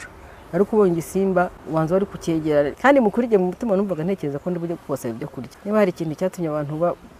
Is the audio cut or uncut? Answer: cut